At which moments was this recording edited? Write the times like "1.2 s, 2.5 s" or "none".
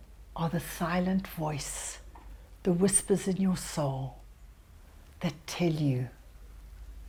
none